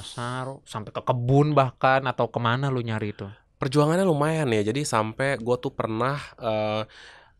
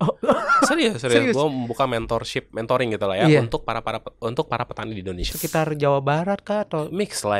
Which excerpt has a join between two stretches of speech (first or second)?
second